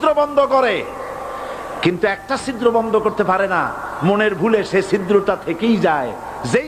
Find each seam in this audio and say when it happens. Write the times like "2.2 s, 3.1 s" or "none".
none